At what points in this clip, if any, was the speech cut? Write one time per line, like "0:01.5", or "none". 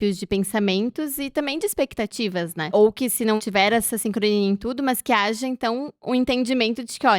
0:02.7
0:03.4